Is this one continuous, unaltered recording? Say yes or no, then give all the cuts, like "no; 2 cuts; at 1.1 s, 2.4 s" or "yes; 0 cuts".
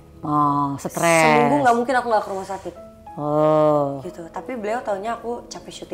yes; 0 cuts